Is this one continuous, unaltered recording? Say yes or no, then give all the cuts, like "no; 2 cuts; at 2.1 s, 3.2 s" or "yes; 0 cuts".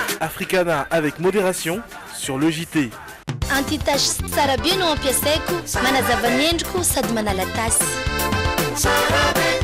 no; 1 cut; at 3.2 s